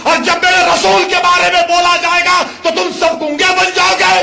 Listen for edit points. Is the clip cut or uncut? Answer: uncut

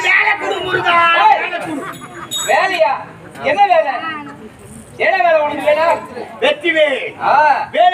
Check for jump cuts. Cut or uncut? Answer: cut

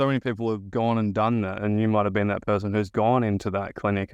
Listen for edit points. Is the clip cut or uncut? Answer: uncut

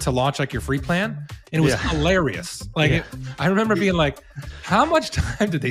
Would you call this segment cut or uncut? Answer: uncut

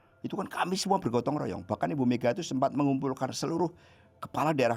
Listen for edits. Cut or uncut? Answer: uncut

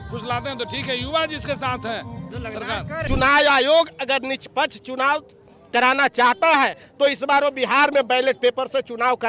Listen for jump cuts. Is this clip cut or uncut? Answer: cut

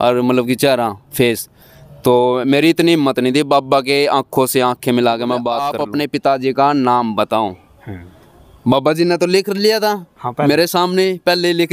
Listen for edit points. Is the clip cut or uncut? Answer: cut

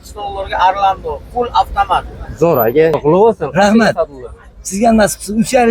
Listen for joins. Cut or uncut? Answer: cut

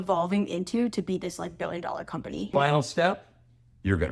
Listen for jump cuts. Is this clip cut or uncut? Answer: cut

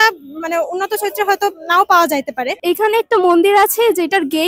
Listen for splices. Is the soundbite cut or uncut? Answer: cut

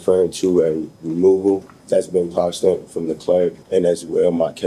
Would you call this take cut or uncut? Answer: cut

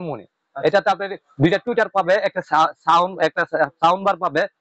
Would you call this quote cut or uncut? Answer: uncut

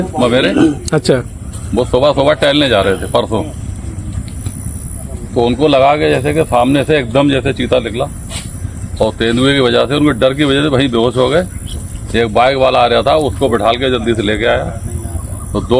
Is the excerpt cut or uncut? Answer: uncut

